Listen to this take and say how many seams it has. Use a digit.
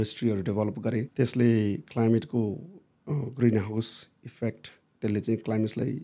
1